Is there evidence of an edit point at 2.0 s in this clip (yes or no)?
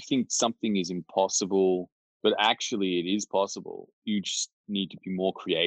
no